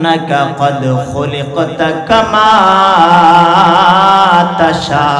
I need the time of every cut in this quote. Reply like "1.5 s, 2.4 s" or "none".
none